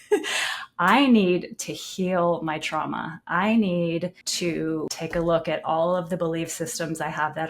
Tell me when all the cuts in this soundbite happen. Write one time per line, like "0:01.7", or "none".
0:04.6